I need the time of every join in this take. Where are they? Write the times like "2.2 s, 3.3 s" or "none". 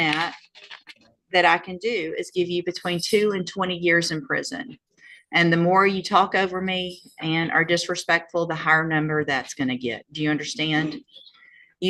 9.4 s